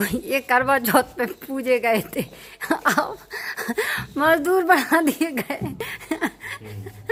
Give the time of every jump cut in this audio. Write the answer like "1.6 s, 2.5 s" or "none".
none